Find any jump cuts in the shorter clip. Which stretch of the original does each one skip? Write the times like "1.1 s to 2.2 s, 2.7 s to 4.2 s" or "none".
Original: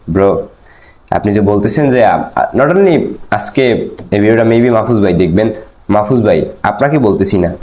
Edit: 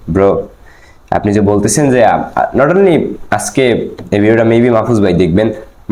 none